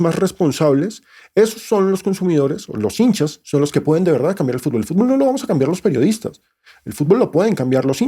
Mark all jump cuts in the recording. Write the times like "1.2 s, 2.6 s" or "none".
none

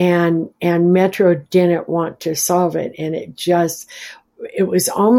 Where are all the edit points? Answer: none

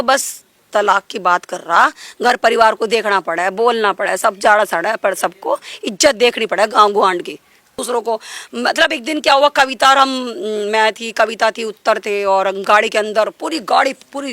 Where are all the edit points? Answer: 7.8 s

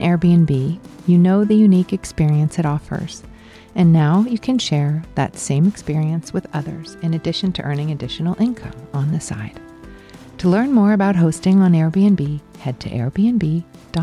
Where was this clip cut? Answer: none

